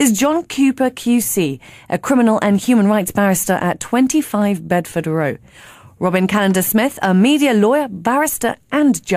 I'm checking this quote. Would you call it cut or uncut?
cut